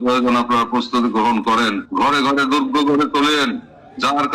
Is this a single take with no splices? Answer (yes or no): no